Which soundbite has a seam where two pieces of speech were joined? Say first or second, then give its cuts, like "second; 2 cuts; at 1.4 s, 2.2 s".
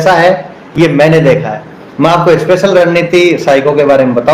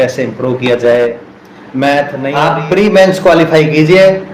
second; 1 cut; at 2.3 s